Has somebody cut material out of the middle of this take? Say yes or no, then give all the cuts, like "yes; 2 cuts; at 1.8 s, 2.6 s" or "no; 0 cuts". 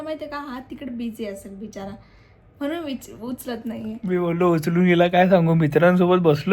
no; 0 cuts